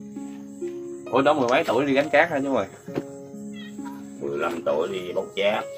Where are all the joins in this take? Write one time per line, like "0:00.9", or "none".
0:00.9
0:02.8
0:04.3